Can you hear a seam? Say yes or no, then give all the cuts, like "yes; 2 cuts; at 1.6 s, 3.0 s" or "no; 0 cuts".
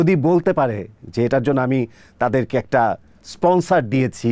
no; 0 cuts